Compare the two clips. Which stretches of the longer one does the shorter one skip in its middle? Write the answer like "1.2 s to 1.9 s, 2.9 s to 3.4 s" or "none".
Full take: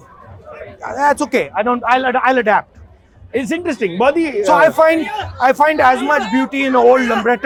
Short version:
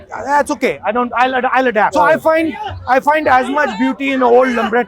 2.6 s to 4.5 s